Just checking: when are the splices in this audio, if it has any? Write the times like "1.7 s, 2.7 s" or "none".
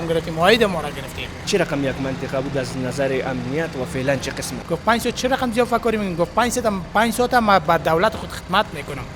1.4 s, 4.5 s